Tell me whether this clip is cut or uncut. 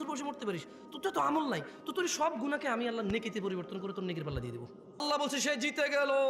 cut